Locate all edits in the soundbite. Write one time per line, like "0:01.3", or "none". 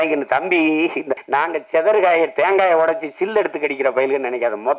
0:01.2